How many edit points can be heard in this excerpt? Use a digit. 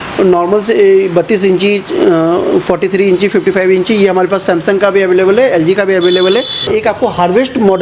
1